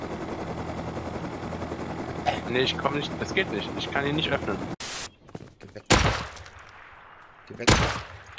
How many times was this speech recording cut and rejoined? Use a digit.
1